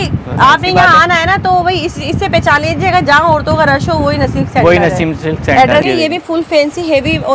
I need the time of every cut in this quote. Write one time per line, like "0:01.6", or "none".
0:05.8